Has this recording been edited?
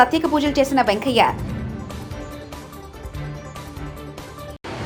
no; 0 cuts

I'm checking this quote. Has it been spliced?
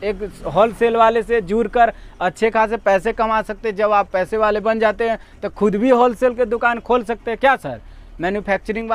no; 0 cuts

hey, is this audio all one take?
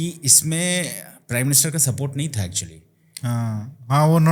yes; 0 cuts

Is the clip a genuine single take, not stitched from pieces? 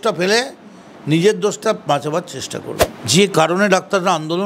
no; 1 cut; at 2.7 s

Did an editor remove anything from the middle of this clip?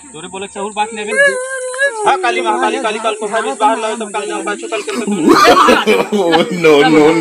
yes; 1 cut; at 1.1 s

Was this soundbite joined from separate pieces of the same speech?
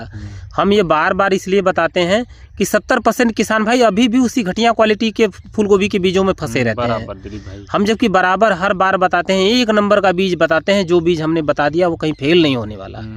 no; 0 cuts

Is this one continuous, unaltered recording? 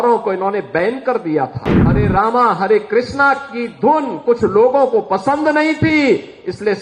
no; 1 cut; at 2.0 s

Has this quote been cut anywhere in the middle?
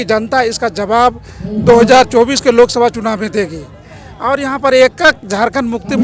no; 0 cuts

